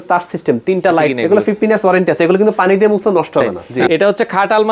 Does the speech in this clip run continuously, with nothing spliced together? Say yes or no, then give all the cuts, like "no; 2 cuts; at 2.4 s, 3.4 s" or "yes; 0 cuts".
no; 2 cuts; at 1.2 s, 3.7 s